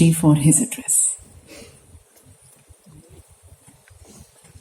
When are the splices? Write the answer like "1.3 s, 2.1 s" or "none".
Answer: none

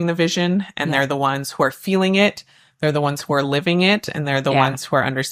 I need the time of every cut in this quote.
none

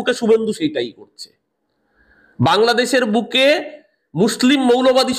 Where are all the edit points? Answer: none

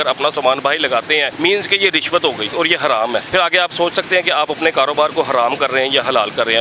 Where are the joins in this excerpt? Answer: 1.3 s, 2.5 s, 3.3 s

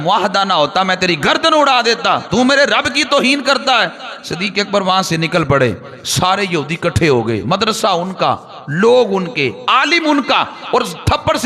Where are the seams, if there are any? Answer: none

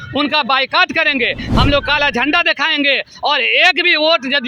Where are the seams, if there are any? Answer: 1.5 s

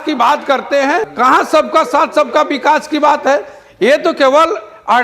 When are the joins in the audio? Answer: 1.1 s

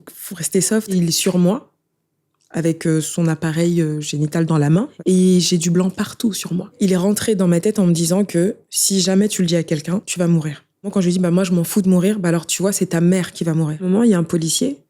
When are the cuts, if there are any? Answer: 0.9 s, 4.9 s, 6.7 s, 10.1 s, 10.9 s, 13.8 s

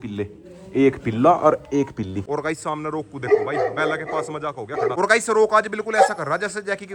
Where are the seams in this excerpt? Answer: 2.3 s, 4.9 s

